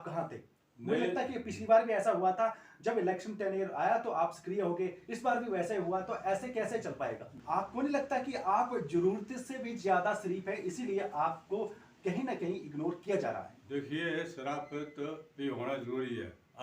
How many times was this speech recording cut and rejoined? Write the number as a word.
one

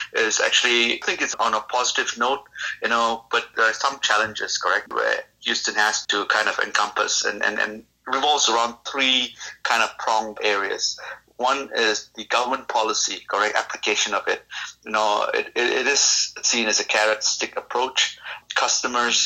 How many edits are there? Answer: seven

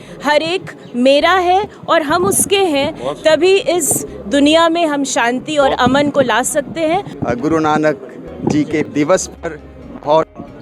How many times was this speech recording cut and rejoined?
two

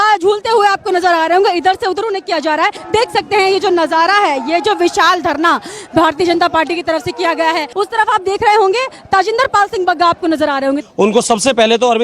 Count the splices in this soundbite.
three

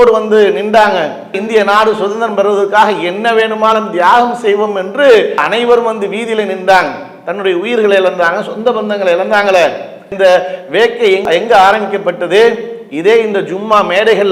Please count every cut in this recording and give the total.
zero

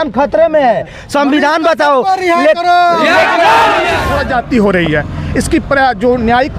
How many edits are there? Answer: one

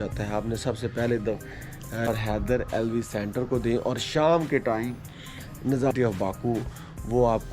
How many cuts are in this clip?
two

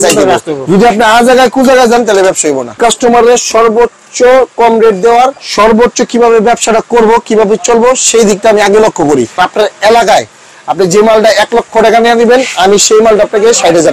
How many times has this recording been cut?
three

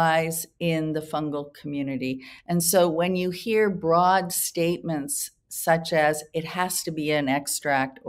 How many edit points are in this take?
zero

